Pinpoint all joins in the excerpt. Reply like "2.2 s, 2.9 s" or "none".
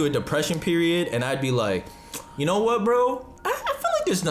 3.3 s

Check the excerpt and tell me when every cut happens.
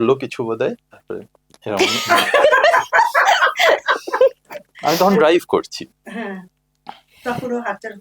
none

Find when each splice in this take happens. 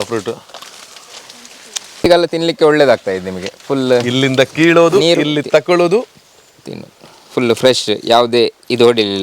2.0 s

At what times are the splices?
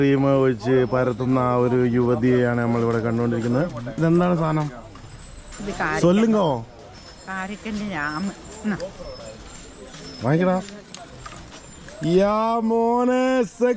none

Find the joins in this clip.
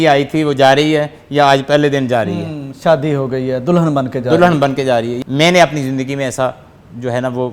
5.1 s

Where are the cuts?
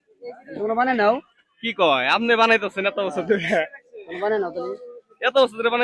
1.3 s

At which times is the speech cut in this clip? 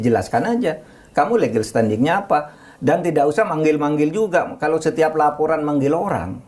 none

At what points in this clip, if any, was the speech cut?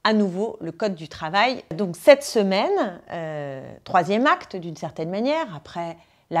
1.7 s

